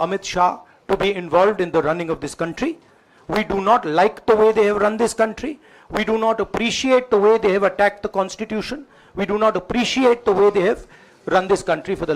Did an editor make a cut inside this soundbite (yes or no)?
no